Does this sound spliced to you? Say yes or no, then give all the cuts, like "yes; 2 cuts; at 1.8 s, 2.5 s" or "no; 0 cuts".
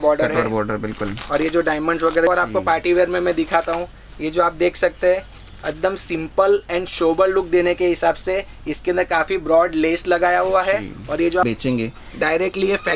yes; 2 cuts; at 2.3 s, 11.4 s